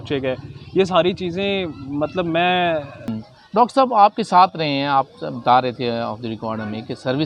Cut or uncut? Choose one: cut